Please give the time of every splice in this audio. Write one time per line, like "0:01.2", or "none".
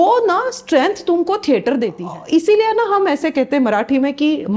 0:02.1